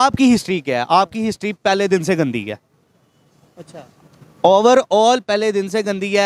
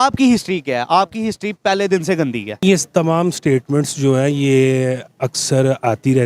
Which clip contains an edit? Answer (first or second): second